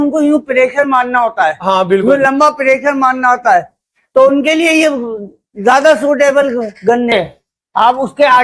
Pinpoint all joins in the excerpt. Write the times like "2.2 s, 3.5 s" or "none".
7.1 s